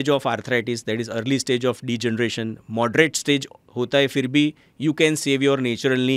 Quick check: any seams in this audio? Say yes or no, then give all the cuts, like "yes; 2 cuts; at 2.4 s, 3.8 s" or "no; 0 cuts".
no; 0 cuts